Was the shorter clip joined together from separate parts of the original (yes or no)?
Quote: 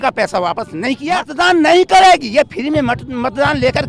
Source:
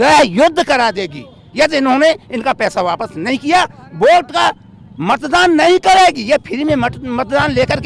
yes